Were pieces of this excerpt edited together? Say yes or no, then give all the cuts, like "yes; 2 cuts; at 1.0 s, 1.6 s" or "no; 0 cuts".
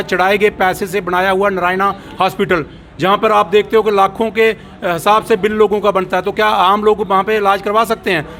no; 0 cuts